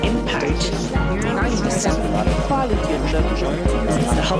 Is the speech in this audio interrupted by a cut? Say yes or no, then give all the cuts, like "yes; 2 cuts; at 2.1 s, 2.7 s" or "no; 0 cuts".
yes; 1 cut; at 1.9 s